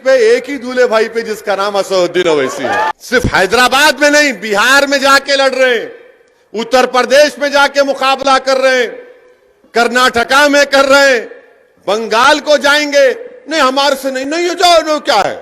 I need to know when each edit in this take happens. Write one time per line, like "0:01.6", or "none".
0:02.9